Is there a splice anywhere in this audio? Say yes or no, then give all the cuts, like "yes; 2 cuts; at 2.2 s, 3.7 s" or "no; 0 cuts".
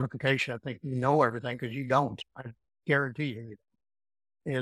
no; 0 cuts